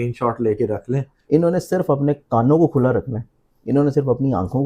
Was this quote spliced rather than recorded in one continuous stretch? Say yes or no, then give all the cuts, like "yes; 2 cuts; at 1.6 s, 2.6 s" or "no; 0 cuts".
yes; 1 cut; at 1.1 s